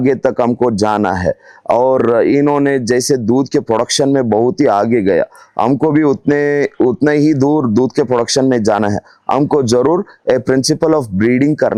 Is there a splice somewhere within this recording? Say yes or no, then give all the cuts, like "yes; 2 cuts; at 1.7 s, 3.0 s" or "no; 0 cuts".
no; 0 cuts